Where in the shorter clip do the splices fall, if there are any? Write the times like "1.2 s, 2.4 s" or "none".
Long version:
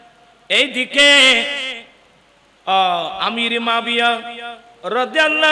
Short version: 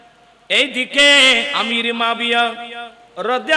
1.5 s